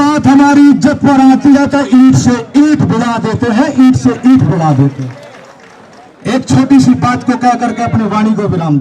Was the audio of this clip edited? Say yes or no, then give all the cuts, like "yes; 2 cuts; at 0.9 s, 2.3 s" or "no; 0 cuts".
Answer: no; 0 cuts